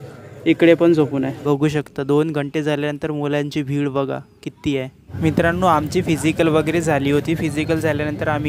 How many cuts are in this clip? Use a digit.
2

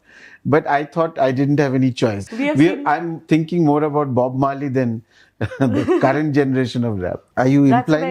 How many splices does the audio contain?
2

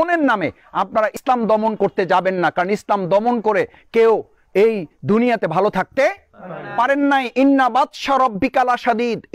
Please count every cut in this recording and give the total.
1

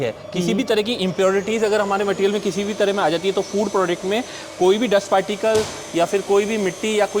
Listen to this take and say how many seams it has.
0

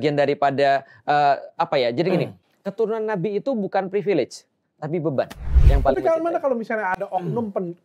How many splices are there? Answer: 1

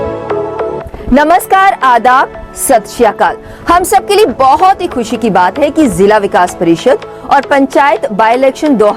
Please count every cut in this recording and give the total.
1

